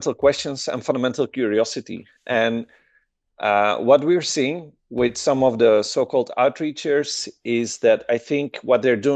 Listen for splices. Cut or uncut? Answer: uncut